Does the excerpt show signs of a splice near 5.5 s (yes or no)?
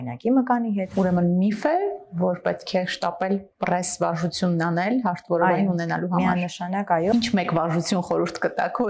no